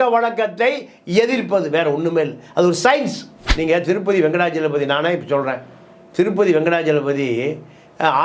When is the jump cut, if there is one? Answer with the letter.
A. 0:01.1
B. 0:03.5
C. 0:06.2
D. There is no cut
B